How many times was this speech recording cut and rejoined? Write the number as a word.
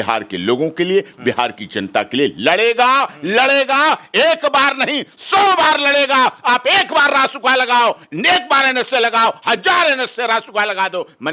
zero